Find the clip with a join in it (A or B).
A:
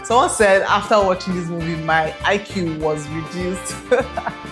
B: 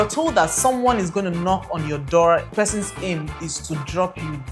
B